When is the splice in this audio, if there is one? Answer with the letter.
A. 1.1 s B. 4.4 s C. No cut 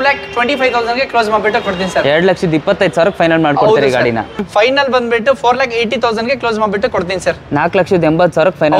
B